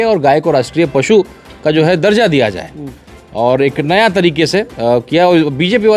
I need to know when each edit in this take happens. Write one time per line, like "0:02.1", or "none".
none